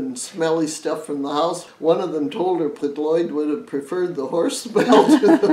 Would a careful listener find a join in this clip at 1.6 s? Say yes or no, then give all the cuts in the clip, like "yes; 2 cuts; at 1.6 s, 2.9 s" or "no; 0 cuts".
yes; 2 cuts; at 1.6 s, 2.8 s